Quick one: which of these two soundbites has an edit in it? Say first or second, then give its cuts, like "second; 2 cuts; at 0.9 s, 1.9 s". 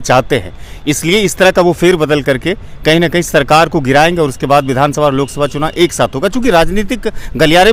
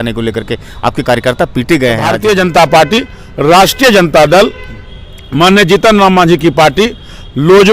second; 1 cut; at 2.1 s